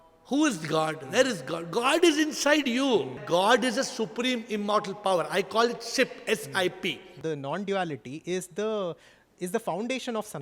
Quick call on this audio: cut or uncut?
cut